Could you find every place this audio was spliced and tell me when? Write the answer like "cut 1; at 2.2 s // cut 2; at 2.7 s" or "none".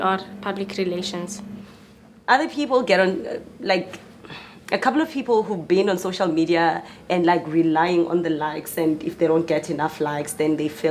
none